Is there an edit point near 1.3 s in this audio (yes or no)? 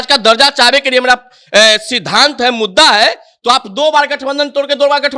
no